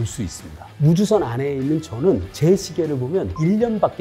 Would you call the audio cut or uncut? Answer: uncut